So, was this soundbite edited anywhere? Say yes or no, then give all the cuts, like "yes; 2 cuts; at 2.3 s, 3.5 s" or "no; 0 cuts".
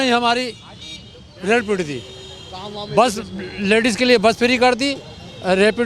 no; 0 cuts